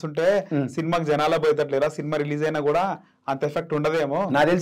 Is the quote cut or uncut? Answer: uncut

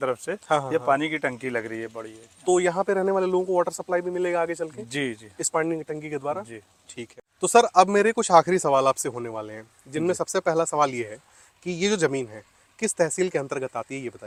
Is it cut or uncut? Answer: uncut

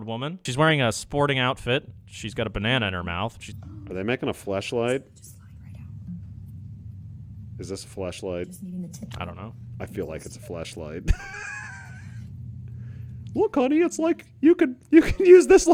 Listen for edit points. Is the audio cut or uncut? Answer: uncut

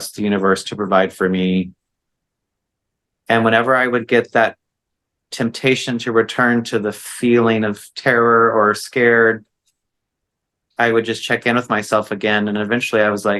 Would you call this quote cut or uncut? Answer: uncut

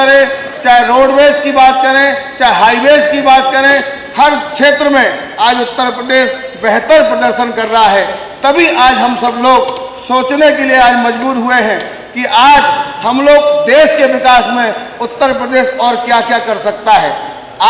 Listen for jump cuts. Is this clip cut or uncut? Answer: uncut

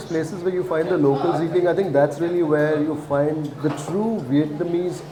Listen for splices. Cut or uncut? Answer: uncut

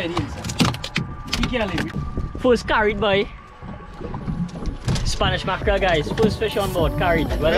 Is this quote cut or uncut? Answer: cut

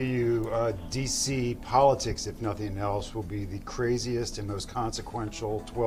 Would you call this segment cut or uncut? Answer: uncut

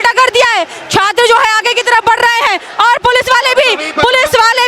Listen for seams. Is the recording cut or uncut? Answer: uncut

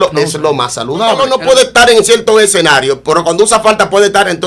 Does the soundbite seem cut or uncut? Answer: cut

